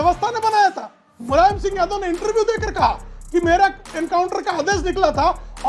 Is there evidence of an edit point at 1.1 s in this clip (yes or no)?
yes